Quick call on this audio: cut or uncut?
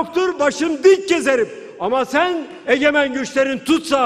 uncut